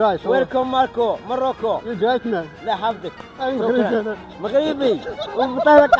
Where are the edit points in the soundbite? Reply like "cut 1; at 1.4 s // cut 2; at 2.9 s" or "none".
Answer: none